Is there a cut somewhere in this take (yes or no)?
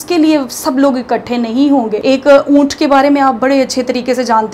yes